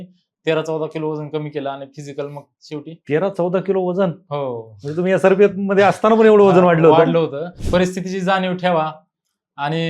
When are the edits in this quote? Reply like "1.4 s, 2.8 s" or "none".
7.5 s